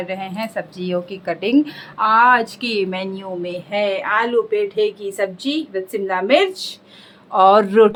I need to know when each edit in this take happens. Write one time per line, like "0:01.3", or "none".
none